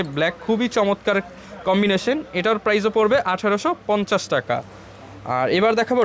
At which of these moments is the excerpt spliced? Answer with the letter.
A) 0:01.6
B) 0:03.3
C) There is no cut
C